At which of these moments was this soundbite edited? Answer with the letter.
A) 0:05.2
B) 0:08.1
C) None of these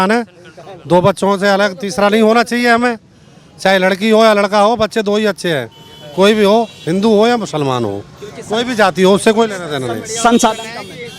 C